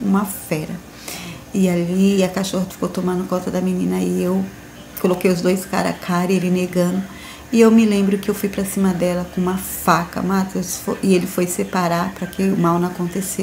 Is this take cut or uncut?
uncut